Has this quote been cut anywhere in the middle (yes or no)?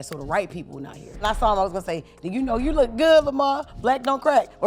yes